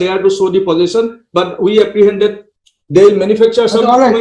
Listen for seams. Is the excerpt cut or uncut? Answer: uncut